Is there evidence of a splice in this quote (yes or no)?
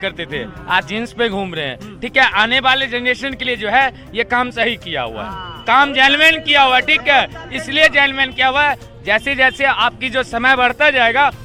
no